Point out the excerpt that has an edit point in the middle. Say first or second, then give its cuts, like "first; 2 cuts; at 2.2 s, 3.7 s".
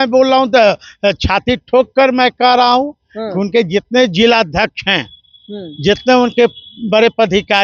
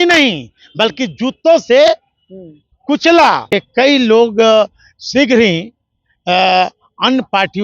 second; 1 cut; at 3.4 s